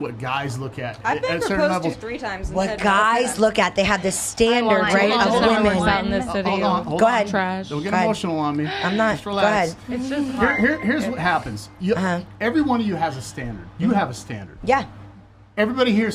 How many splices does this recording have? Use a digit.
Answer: 0